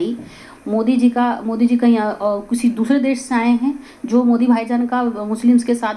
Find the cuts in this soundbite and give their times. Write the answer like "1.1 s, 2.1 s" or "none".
none